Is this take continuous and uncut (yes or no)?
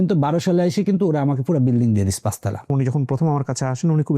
no